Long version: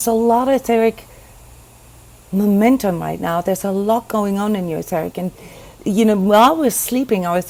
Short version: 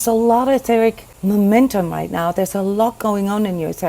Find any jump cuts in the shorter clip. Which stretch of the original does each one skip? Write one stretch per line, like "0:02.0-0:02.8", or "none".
0:01.1-0:02.2